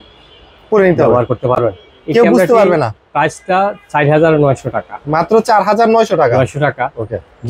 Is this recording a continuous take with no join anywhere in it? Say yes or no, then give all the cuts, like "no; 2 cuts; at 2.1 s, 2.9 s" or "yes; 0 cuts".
yes; 0 cuts